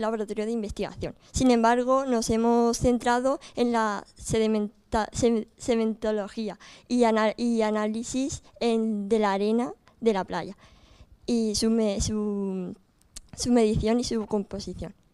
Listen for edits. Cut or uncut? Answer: uncut